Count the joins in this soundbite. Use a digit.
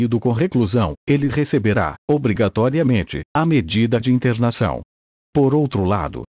1